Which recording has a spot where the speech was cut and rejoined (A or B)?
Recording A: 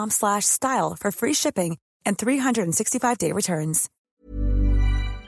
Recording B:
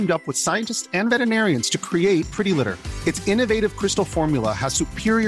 A